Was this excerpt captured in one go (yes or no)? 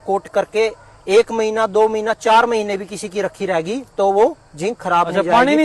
yes